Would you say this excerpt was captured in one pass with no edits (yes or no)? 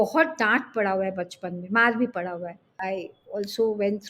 no